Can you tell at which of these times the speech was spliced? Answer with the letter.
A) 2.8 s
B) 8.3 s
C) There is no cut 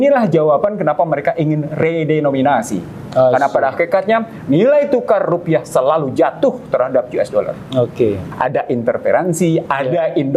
B